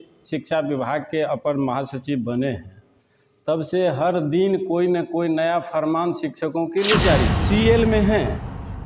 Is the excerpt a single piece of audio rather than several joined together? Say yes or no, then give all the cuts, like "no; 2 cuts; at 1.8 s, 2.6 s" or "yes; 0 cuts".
no; 1 cut; at 7.4 s